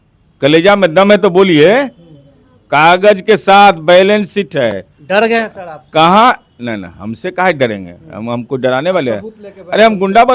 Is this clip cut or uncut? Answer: uncut